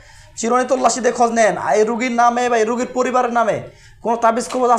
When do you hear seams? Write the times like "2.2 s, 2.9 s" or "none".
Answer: none